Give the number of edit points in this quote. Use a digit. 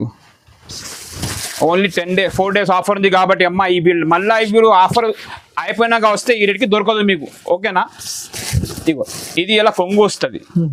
0